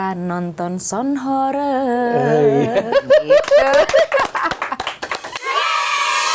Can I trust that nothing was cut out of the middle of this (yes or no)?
yes